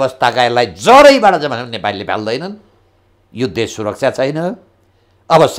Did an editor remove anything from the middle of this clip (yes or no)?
no